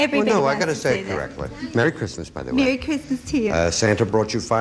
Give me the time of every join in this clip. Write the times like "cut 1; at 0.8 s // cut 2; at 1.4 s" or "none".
cut 1; at 1.8 s

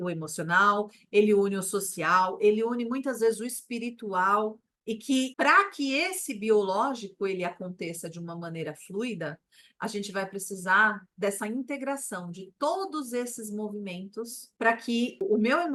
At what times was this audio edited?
none

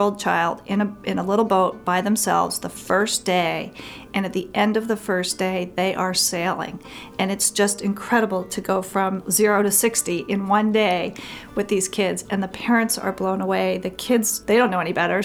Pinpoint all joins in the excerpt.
cut 1; at 9.2 s // cut 2; at 14.4 s

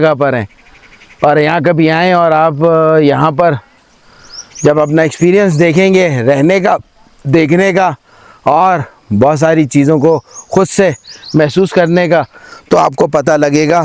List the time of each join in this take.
none

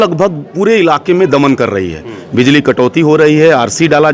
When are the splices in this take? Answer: none

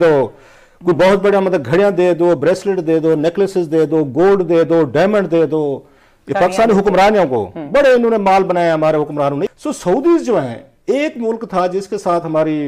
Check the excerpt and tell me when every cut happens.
cut 1; at 9.5 s

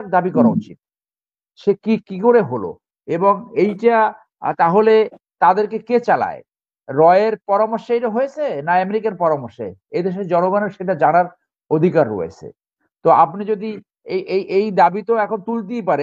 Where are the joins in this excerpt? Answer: none

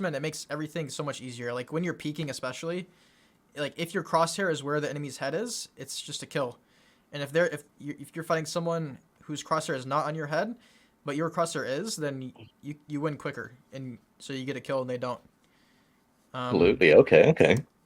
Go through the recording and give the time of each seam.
none

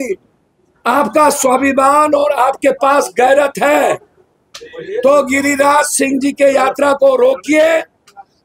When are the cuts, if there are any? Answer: none

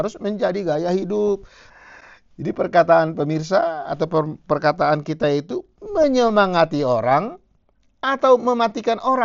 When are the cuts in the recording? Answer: cut 1; at 1.6 s

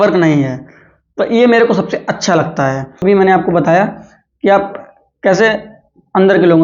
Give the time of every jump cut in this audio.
cut 1; at 3.0 s

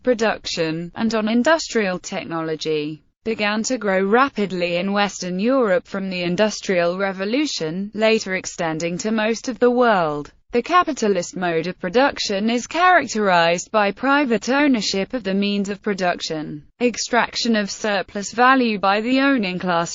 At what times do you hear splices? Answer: none

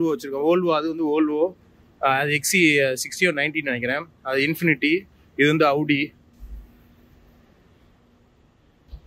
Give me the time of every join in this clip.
none

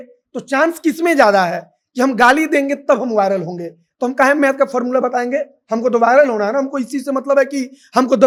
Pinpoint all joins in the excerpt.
none

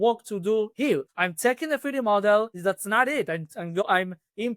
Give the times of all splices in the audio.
cut 1; at 0.8 s // cut 2; at 2.5 s // cut 3; at 3.8 s

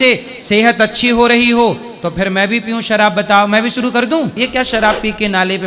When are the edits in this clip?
cut 1; at 4.3 s

